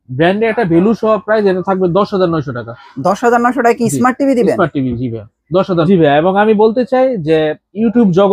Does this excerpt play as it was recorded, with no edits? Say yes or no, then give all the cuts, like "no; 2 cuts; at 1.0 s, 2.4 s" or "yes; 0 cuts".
no; 1 cut; at 5.9 s